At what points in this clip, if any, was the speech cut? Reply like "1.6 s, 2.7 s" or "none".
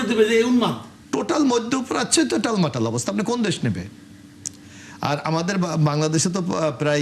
0.9 s